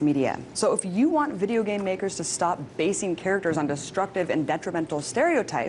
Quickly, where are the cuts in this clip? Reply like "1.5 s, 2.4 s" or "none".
1.8 s